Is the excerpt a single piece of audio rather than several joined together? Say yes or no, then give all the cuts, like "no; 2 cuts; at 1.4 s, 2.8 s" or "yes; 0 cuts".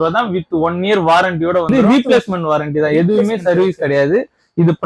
no; 1 cut; at 1.7 s